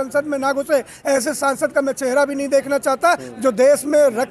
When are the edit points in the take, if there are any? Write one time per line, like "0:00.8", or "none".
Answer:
0:01.0